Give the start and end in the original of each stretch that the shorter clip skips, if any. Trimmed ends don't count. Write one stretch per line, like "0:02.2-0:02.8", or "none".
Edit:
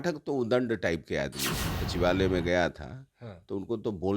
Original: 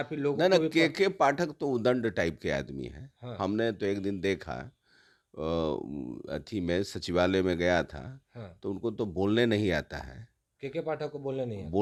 0:03.2-0:07.0

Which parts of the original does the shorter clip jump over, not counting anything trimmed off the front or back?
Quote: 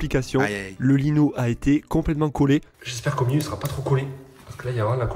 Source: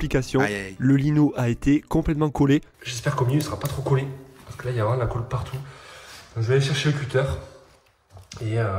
none

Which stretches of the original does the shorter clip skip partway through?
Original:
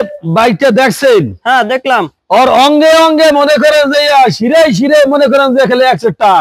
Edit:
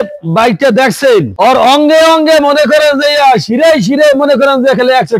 0:01.3-0:02.2

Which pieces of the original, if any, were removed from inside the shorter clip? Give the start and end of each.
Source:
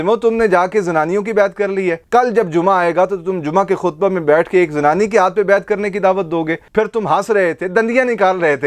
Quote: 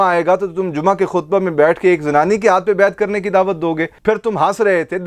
none

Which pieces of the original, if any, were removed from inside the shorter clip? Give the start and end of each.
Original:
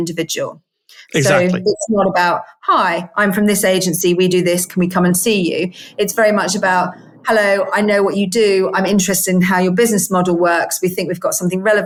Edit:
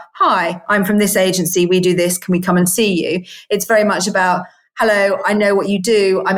none

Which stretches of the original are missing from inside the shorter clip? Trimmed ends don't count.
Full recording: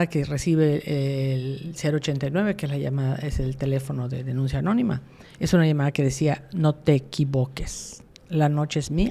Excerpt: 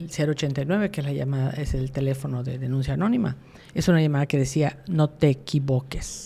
none

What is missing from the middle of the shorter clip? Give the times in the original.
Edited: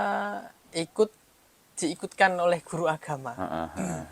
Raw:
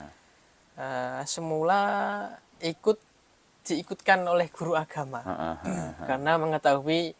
none

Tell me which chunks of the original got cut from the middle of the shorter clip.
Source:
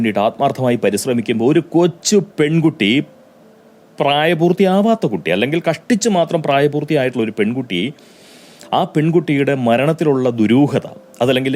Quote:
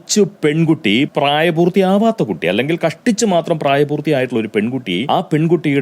0:03.1-0:03.9
0:07.9-0:08.7

